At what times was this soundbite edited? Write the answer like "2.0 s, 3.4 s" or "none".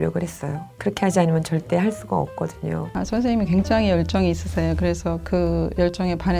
3.0 s